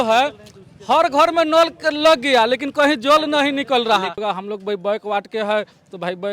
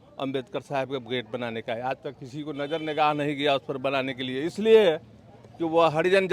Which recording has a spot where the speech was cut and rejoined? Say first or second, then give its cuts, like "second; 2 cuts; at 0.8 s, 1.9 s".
first; 1 cut; at 4.2 s